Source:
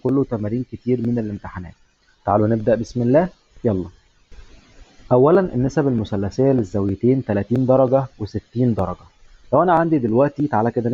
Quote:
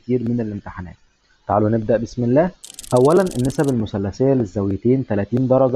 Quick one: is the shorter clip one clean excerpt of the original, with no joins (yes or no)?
no